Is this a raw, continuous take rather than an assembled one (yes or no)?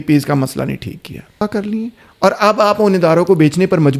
no